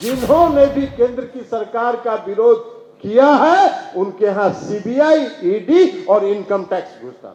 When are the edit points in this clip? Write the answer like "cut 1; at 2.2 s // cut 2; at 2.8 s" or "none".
none